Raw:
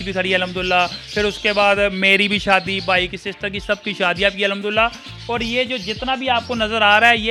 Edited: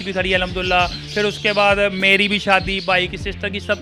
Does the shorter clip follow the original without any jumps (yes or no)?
yes